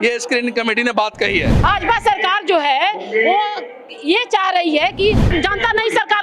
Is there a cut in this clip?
yes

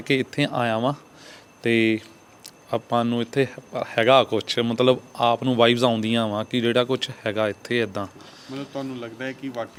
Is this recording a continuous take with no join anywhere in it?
yes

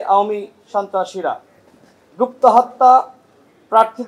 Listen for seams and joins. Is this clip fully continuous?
yes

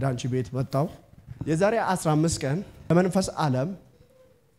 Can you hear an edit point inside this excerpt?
yes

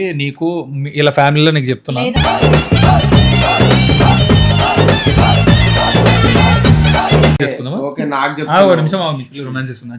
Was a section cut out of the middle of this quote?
yes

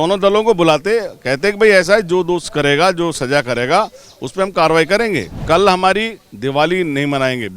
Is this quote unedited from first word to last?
no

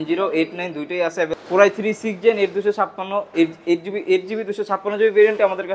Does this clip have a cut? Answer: yes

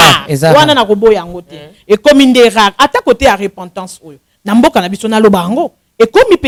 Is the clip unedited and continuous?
yes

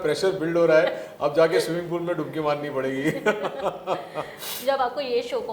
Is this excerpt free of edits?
yes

